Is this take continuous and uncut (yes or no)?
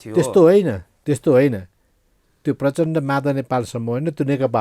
yes